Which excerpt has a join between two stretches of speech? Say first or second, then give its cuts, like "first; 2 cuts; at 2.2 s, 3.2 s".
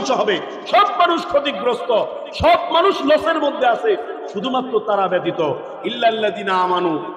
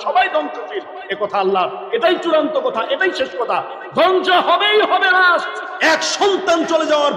second; 1 cut; at 5.6 s